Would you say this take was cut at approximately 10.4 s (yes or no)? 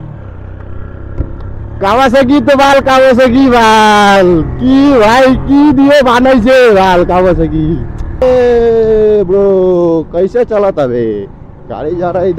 no